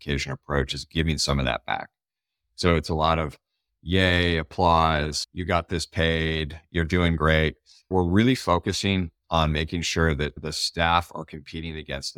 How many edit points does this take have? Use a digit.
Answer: 1